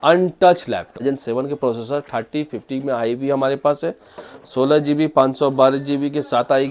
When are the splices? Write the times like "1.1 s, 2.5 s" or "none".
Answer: 1.0 s